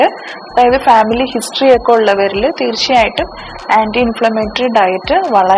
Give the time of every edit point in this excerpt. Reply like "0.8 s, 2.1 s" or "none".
none